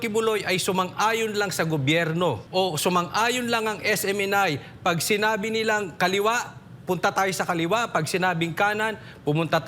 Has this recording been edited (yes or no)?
yes